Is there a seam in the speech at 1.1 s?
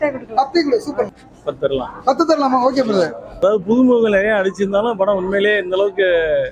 yes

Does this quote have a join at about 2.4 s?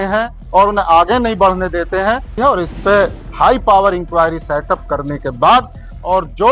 yes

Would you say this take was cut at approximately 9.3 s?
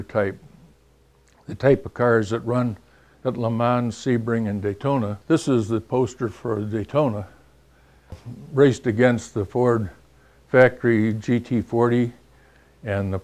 no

